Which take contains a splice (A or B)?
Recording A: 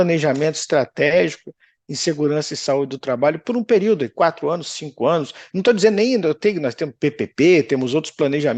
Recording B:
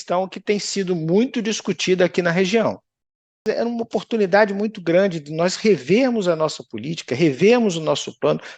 B